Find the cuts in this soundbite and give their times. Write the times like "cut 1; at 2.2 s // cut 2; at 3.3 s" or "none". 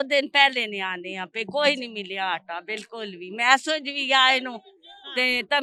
none